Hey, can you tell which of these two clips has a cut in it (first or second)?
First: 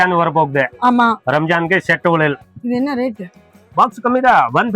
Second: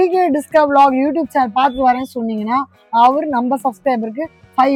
first